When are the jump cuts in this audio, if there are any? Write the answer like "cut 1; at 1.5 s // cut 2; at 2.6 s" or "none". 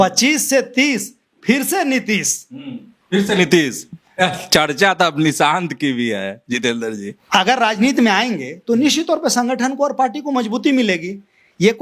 cut 1; at 7.1 s